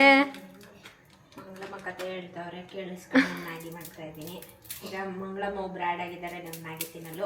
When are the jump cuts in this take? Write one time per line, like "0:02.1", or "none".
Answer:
none

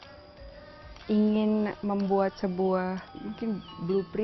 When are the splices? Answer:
0:03.2

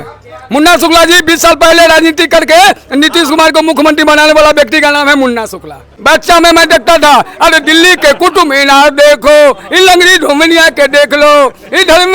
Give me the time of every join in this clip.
0:06.0

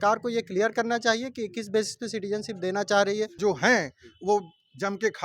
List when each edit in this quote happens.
0:03.4

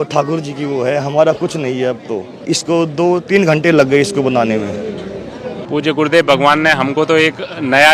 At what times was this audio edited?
0:02.4
0:05.5

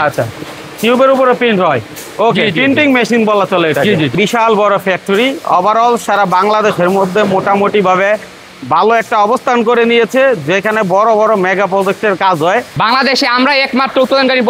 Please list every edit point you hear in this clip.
0:04.1
0:12.7

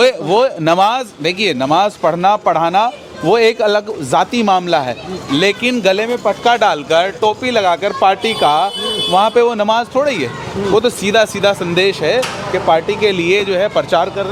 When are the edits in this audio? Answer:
none

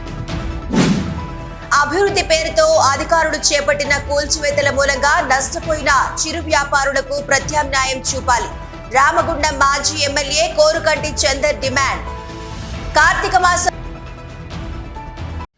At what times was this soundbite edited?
0:00.9

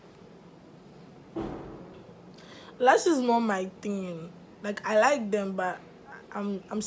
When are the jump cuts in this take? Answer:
none

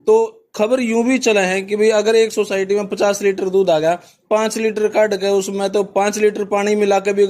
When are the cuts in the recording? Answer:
none

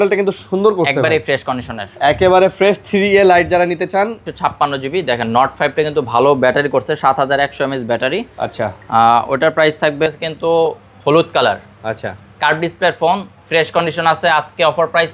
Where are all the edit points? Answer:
0:04.2
0:10.1

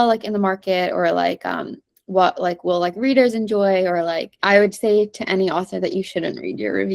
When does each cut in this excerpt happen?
0:04.3

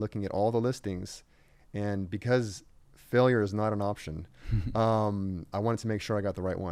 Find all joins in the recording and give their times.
none

